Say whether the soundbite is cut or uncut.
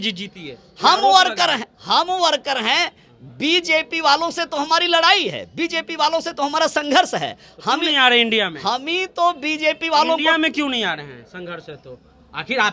uncut